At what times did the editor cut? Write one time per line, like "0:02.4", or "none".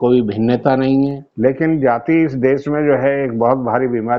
0:01.2